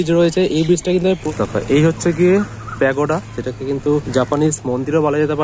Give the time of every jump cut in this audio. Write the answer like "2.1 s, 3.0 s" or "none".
0.8 s, 4.1 s